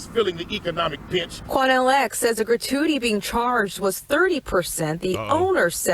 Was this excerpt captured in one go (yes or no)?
no